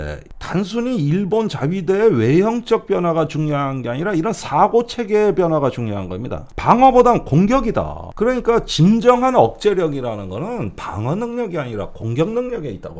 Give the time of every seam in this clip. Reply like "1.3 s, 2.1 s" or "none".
none